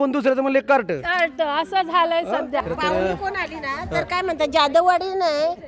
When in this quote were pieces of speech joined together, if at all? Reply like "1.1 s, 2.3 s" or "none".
2.6 s